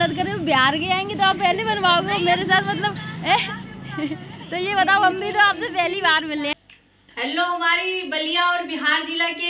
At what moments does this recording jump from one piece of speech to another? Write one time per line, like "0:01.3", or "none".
0:06.5